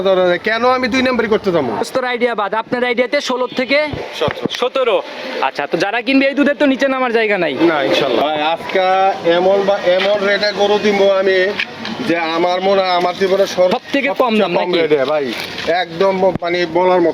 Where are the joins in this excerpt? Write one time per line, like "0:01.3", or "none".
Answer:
0:01.8
0:08.2
0:13.7